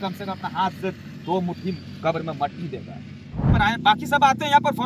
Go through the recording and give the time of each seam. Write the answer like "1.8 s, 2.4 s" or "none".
3.5 s